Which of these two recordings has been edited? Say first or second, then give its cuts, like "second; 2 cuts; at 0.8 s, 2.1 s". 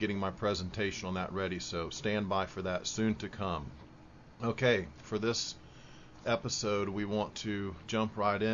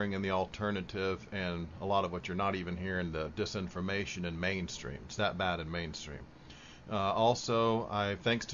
second; 1 cut; at 1.5 s